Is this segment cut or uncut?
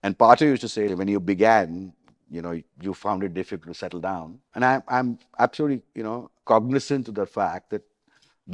cut